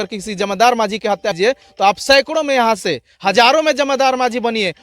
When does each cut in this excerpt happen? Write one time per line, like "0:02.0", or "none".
0:01.3